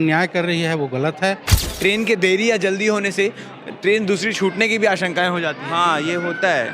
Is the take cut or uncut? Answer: cut